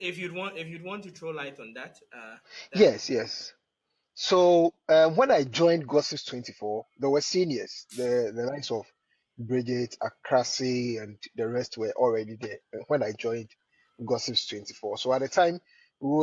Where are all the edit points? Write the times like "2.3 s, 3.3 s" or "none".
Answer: none